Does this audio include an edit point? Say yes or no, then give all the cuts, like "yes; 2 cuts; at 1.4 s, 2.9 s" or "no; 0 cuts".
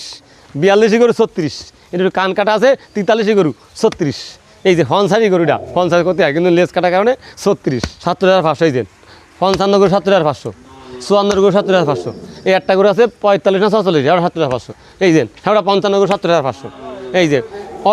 yes; 1 cut; at 7.9 s